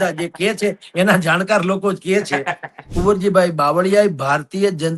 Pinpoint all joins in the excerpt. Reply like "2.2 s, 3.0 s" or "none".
2.9 s